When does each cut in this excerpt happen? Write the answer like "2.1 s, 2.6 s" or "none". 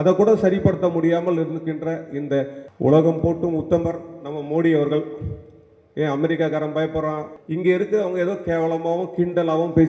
2.6 s, 7.3 s